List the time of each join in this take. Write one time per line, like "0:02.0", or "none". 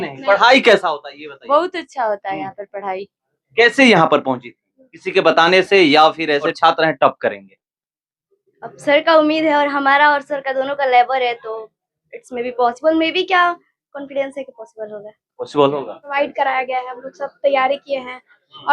0:06.5
0:16.1